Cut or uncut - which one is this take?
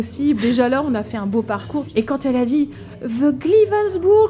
cut